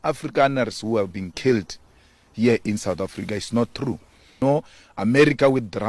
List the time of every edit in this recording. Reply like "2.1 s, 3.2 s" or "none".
4.4 s